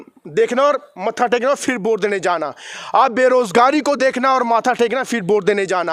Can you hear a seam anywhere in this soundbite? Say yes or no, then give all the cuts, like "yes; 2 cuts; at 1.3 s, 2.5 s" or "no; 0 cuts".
no; 0 cuts